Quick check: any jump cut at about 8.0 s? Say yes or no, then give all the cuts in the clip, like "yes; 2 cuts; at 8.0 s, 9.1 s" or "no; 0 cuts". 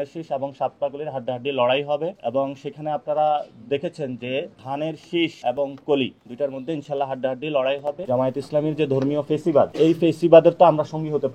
yes; 3 cuts; at 5.4 s, 8.0 s, 9.7 s